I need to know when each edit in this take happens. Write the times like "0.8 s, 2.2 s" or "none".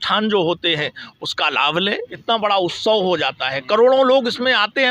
2.1 s